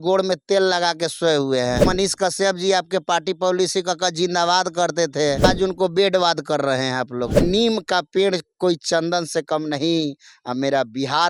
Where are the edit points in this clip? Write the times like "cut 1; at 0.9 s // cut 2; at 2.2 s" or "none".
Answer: cut 1; at 1.9 s // cut 2; at 5.5 s // cut 3; at 7.4 s

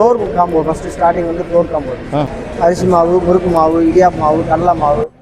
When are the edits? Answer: cut 1; at 2.3 s

